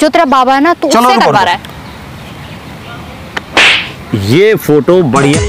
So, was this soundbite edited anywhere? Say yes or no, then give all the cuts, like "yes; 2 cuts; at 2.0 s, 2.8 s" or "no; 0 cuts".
yes; 1 cut; at 1.6 s